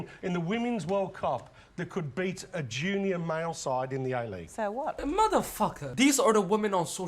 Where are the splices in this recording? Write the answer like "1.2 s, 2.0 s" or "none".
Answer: 5.0 s, 5.8 s